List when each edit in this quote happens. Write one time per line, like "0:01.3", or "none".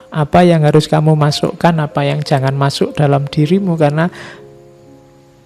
none